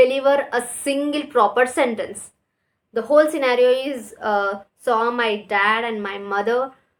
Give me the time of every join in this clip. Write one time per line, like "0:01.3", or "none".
none